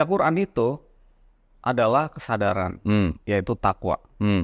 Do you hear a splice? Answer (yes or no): no